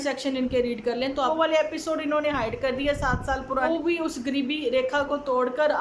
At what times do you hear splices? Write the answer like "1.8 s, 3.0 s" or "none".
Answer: 1.3 s, 3.6 s